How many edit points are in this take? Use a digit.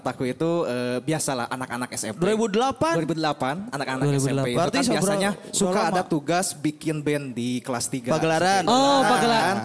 0